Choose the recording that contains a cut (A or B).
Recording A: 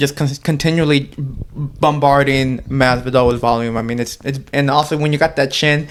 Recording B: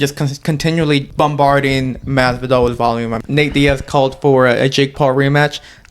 B